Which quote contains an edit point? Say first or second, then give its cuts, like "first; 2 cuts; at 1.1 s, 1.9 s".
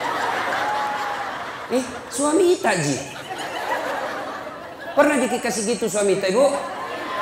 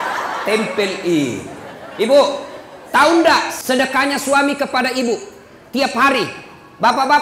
second; 1 cut; at 3.5 s